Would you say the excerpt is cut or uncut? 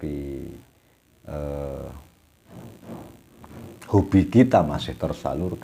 uncut